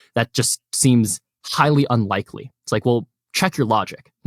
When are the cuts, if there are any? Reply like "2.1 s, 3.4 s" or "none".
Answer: none